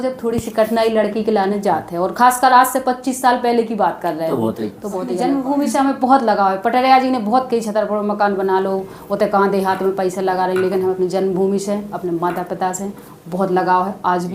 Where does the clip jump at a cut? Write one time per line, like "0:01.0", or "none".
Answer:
0:05.1